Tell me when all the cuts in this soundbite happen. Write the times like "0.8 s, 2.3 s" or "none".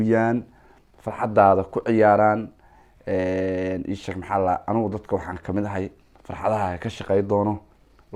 none